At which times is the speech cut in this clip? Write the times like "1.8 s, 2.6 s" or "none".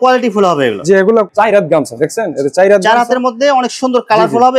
1.3 s